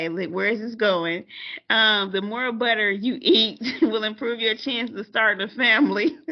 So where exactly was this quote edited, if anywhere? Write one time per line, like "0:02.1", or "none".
none